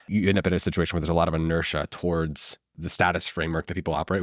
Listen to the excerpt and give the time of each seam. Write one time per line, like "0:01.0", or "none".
0:02.8